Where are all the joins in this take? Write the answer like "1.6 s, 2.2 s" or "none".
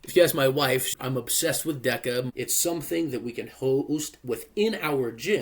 0.9 s, 2.3 s